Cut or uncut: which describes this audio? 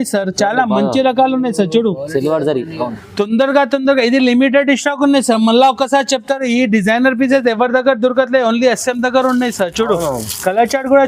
uncut